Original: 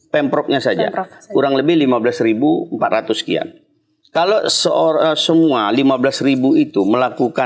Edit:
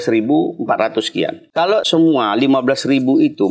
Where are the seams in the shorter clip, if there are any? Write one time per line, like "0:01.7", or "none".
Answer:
0:01.8